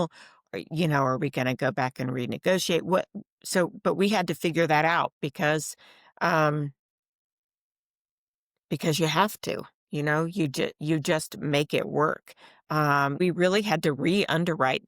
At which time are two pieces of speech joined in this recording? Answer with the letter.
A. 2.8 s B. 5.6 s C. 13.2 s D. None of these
C